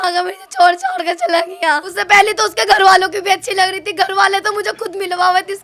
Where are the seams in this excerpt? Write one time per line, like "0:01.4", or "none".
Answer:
0:01.9